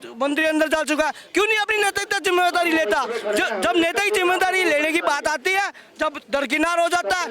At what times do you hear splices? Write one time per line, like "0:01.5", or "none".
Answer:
none